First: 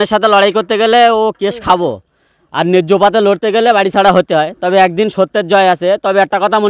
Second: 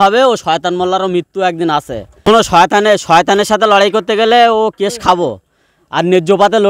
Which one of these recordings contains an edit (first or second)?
second